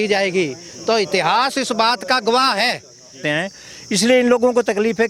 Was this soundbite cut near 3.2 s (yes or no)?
yes